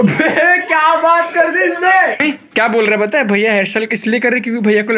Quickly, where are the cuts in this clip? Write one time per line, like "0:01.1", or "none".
0:02.1